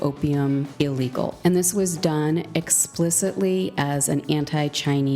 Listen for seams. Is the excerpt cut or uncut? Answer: cut